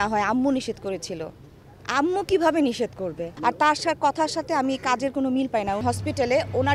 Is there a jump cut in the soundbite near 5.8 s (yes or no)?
yes